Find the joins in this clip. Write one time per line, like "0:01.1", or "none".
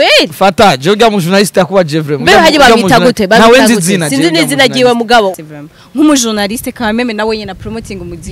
0:05.3